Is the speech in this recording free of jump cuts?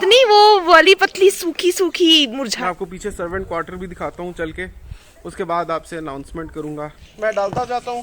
no; 2 cuts; at 2.5 s, 7.0 s

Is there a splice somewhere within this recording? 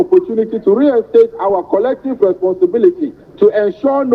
no; 0 cuts

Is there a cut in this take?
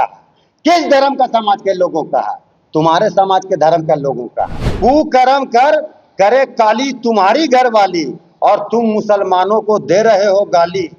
yes; 1 cut; at 4.6 s

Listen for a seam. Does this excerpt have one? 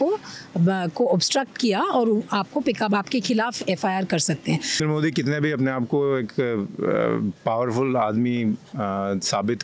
yes; 1 cut; at 4.8 s

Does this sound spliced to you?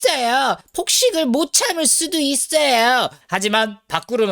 yes; 1 cut; at 3.2 s

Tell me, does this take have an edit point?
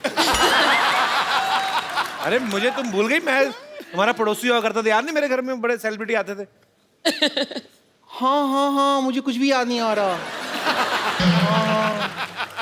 no; 0 cuts

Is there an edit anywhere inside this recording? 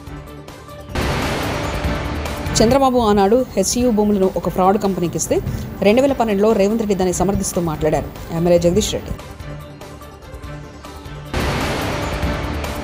yes; 2 cuts; at 0.9 s, 2.5 s

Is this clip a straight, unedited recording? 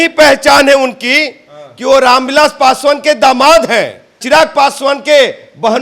yes; 0 cuts

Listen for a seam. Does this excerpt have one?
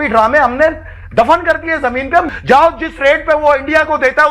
yes; 1 cut; at 2.3 s

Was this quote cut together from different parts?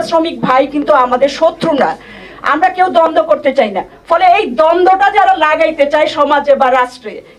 no; 0 cuts

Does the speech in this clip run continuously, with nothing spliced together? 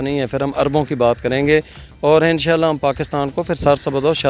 yes; 0 cuts

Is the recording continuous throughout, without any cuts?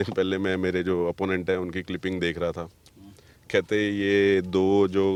yes; 0 cuts

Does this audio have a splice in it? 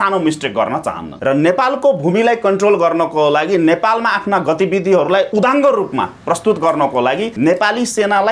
yes; 3 cuts; at 1.1 s, 5.3 s, 7.3 s

